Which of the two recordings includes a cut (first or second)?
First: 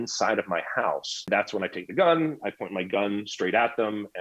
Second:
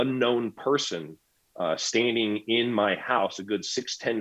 first